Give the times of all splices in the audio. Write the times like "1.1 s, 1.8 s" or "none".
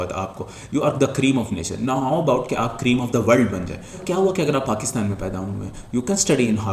3.4 s